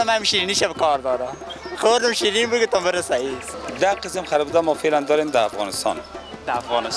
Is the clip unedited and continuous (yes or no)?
no